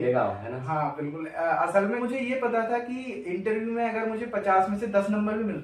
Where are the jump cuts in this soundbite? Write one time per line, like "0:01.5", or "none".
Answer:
0:02.0